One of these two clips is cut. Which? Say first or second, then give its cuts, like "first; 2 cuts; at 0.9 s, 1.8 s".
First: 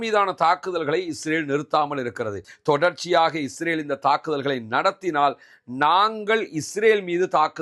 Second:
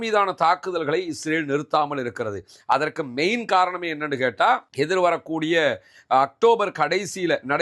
first; 1 cut; at 2.5 s